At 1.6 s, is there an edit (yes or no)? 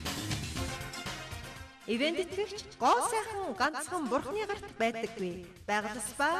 yes